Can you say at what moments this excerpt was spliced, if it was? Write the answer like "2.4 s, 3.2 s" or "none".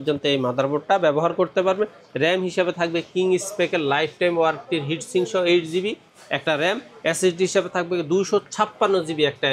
none